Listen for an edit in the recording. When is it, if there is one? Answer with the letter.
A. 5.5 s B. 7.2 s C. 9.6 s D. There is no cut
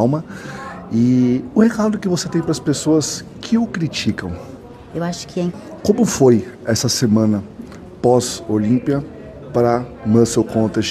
A